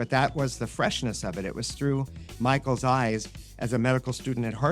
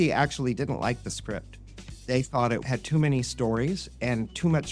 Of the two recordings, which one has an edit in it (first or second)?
second